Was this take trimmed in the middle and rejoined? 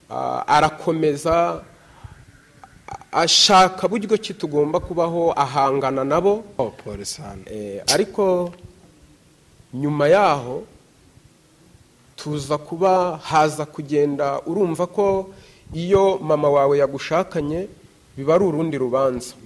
yes; 1 cut; at 6.6 s

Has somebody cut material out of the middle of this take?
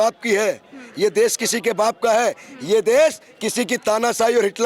no; 0 cuts

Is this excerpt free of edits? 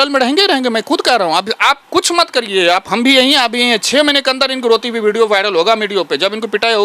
yes; 0 cuts

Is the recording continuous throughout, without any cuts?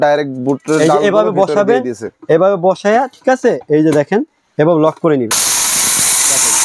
no; 1 cut; at 5.4 s

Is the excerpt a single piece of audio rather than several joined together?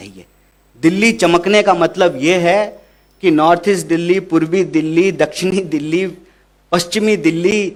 yes; 0 cuts

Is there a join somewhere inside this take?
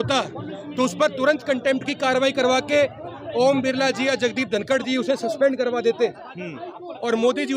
no; 0 cuts

